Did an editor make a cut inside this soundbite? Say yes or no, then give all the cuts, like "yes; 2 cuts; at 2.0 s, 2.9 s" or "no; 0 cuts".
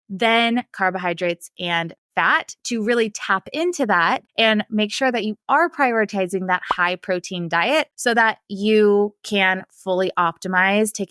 no; 0 cuts